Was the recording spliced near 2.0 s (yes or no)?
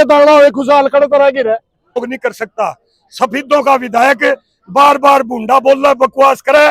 yes